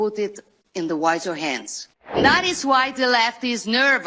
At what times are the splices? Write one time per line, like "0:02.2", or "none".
0:02.2